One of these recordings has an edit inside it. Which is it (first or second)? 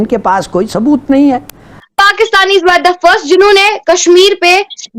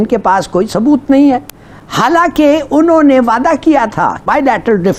first